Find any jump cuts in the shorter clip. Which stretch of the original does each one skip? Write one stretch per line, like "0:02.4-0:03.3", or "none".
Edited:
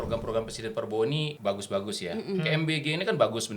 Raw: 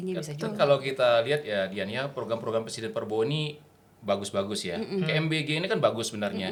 0:03.5-0:04.0